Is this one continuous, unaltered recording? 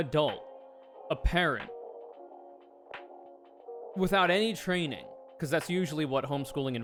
yes; 0 cuts

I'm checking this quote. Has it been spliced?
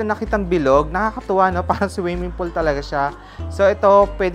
no; 0 cuts

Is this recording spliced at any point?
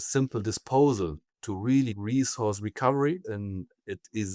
yes; 2 cuts; at 2.0 s, 3.3 s

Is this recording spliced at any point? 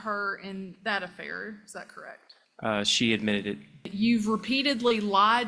yes; 1 cut; at 3.9 s

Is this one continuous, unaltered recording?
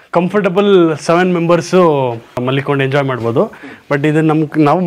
no; 1 cut; at 2.4 s

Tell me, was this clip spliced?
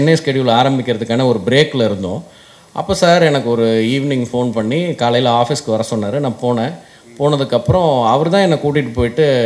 no; 0 cuts

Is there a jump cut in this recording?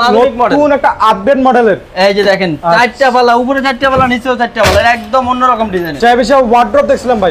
yes; 1 cut; at 6.0 s

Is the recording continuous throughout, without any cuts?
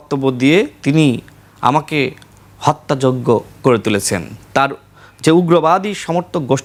yes; 0 cuts

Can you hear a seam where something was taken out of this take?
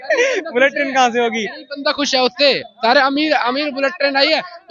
no; 0 cuts

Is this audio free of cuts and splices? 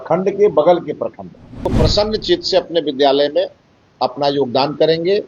no; 1 cut; at 1.7 s

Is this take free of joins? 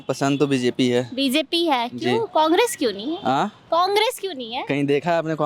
yes; 0 cuts

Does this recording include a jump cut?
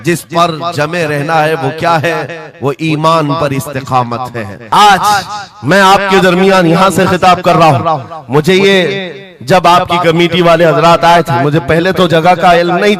yes; 1 cut; at 4.5 s

